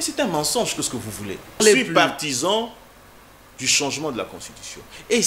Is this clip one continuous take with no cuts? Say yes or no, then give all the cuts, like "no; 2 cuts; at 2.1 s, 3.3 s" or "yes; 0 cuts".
no; 1 cut; at 1.6 s